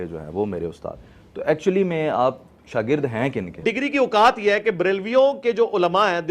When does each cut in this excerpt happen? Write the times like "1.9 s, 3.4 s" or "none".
3.6 s